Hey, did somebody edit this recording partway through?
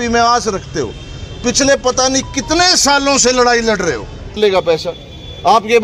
yes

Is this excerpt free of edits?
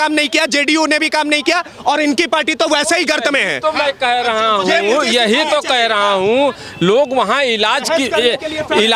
yes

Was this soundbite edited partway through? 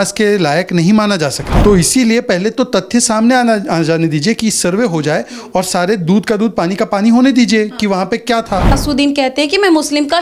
yes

